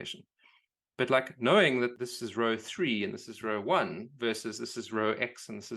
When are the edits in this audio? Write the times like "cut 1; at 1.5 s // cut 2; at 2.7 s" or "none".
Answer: cut 1; at 1.9 s